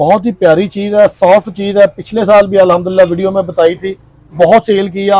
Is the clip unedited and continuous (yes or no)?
yes